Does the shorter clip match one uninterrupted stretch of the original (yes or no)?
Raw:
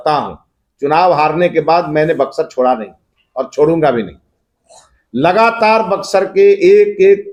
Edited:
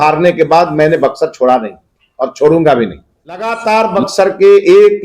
no